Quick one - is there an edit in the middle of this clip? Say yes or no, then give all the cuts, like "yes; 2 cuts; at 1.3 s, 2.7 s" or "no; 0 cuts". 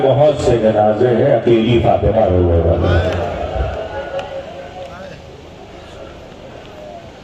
no; 0 cuts